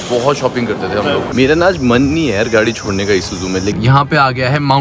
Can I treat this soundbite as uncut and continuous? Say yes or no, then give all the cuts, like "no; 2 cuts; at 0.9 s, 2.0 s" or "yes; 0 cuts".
no; 2 cuts; at 1.2 s, 3.7 s